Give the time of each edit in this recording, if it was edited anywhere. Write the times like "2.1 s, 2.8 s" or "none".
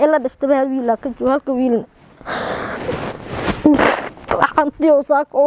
none